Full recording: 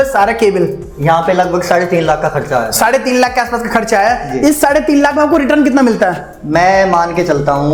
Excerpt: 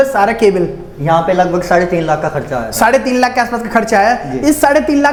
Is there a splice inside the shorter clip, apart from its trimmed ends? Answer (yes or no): no